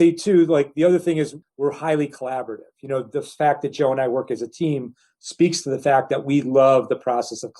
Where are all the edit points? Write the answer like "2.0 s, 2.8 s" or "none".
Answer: 1.4 s